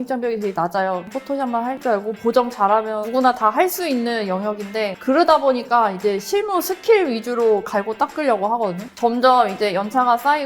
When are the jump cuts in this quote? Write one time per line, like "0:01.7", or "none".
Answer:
0:01.3
0:08.9